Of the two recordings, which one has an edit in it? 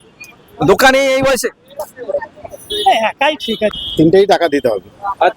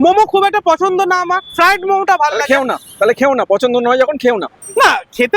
first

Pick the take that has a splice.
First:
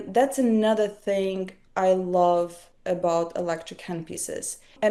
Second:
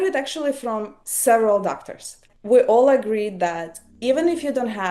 second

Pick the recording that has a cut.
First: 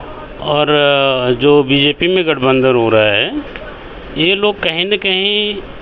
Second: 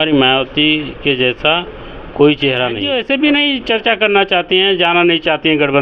second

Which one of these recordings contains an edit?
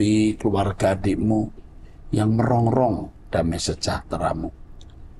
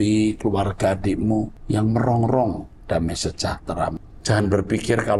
second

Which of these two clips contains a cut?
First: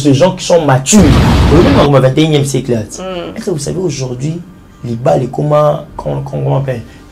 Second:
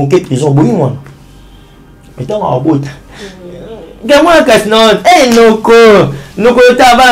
first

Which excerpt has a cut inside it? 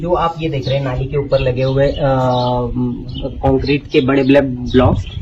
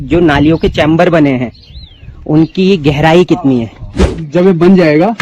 second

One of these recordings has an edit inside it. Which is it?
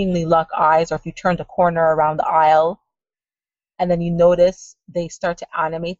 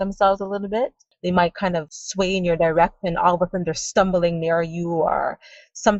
second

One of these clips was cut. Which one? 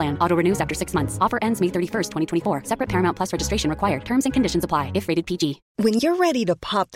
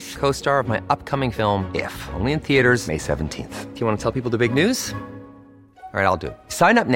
first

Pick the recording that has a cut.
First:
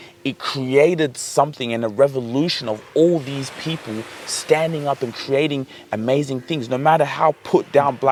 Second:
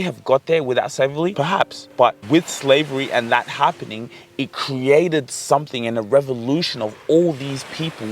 second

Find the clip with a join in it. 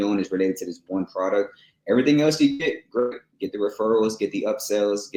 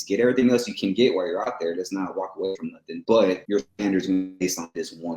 second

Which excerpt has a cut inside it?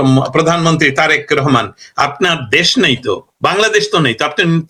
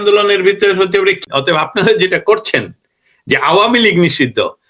second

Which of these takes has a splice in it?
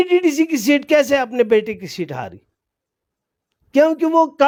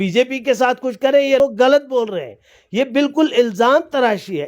second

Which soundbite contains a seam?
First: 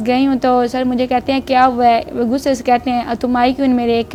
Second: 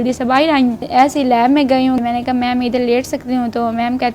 second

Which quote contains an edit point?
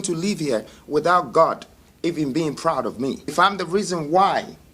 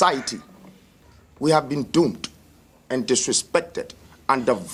first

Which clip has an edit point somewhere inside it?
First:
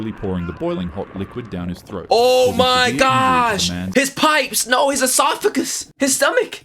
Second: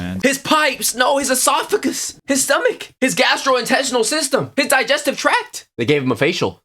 second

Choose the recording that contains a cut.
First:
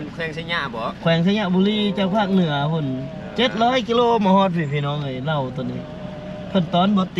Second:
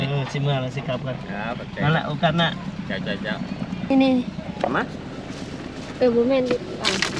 second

